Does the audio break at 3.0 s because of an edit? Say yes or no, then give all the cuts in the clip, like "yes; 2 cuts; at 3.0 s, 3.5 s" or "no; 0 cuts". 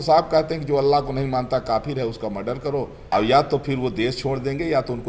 yes; 1 cut; at 3.0 s